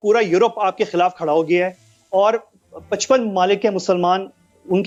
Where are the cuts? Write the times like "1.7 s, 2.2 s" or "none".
none